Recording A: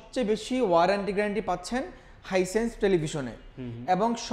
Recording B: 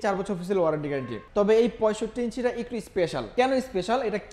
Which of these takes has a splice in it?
B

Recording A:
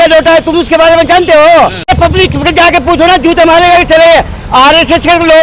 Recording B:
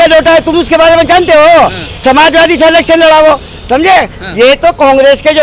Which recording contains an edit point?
A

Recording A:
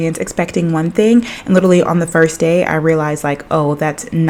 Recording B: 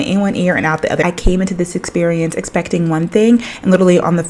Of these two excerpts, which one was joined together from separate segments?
B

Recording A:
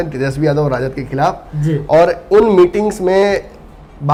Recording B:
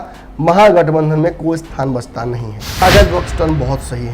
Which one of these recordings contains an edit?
B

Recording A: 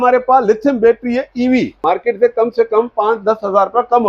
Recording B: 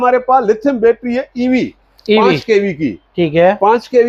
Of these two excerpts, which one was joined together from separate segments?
A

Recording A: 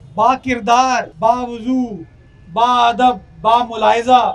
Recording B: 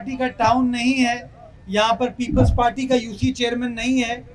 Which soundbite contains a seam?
A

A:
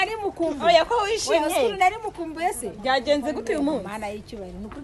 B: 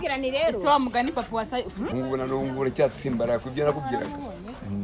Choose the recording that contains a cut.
B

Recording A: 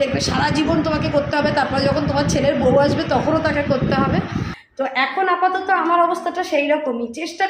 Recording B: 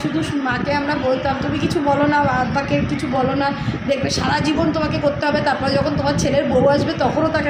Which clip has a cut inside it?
A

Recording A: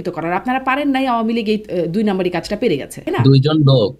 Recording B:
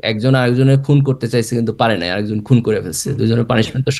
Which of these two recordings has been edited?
A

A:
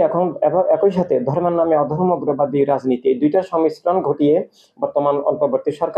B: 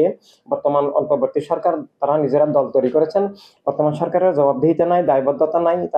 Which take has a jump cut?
B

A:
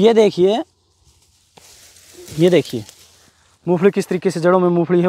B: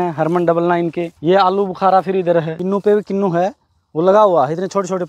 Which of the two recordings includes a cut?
B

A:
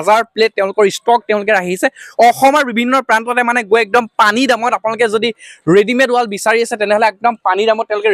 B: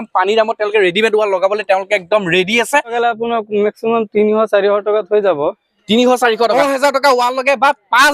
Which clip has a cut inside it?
B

